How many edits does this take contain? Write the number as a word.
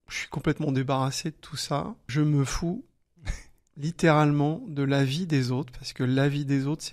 one